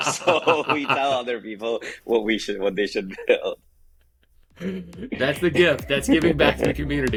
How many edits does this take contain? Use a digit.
0